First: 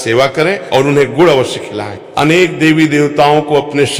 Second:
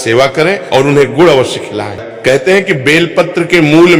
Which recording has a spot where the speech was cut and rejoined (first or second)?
second